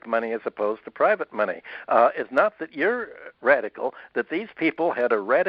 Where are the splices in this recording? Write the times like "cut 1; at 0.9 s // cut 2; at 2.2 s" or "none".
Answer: none